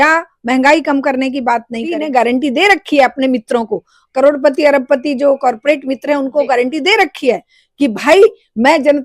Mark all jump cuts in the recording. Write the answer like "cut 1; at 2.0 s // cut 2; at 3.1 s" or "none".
cut 1; at 2.0 s

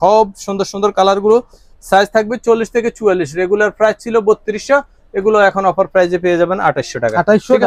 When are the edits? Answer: none

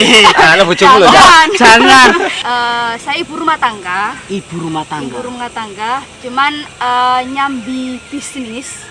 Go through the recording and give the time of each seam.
cut 1; at 2.4 s

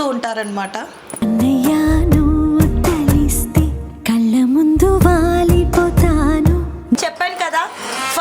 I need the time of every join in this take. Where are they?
cut 1; at 7.0 s

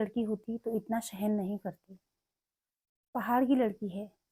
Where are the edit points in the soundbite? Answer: none

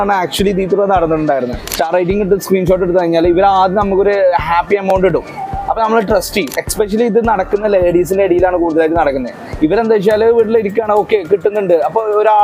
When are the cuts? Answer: cut 1; at 1.7 s // cut 2; at 6.6 s

